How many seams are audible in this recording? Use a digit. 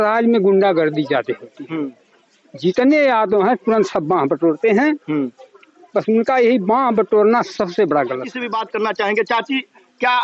0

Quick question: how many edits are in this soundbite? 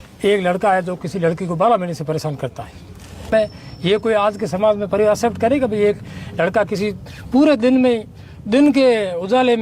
1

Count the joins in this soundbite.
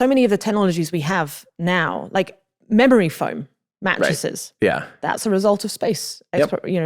0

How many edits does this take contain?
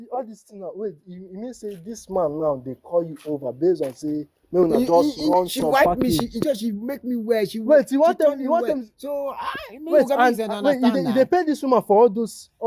0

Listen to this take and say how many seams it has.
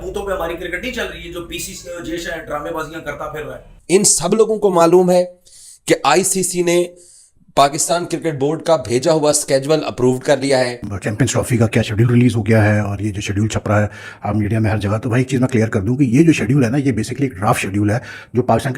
2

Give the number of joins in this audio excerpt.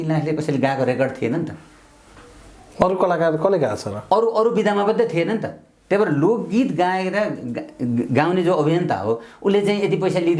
0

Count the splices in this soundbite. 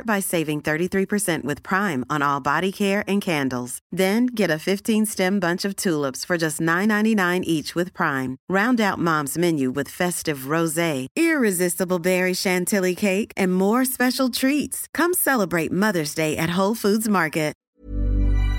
1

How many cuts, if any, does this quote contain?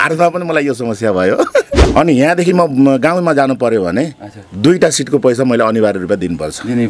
1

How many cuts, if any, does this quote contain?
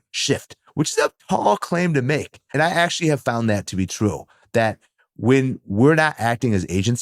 1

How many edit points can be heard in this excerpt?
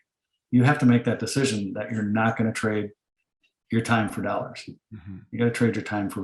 0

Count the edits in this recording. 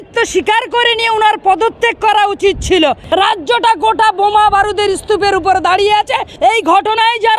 2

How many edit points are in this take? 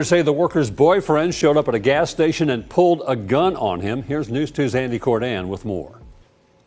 0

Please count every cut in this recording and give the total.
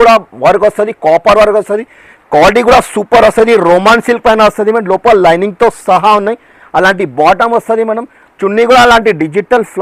0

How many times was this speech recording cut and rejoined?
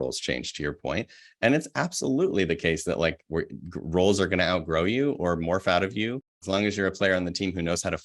1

